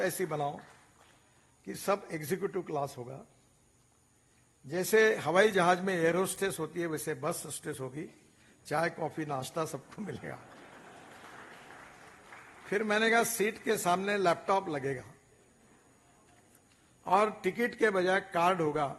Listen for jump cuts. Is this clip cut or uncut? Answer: uncut